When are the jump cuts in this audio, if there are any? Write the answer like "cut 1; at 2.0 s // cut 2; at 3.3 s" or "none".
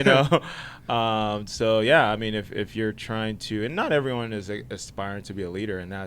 none